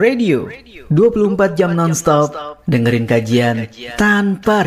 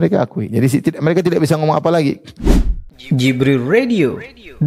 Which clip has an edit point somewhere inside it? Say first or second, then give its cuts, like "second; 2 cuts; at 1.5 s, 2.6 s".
second; 1 cut; at 2.3 s